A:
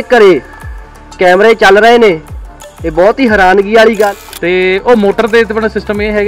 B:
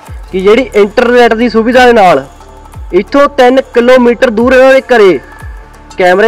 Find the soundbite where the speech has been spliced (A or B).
A